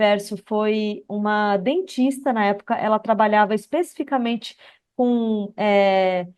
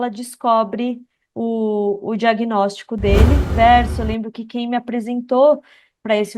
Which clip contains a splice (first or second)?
second